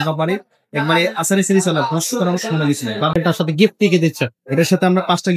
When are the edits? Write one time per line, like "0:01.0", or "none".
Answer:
0:03.1